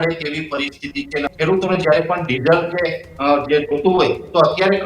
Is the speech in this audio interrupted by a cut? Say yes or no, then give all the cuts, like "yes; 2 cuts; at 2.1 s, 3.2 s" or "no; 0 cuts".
yes; 1 cut; at 1.3 s